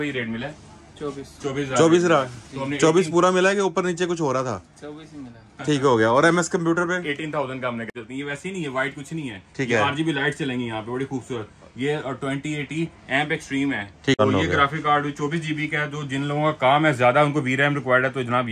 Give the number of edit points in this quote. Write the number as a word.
two